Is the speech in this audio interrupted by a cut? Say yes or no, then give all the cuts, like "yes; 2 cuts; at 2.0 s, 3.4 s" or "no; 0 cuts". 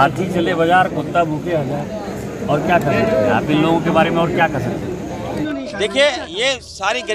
yes; 1 cut; at 5.4 s